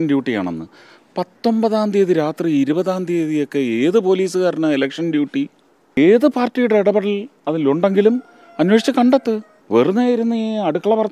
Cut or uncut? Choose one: cut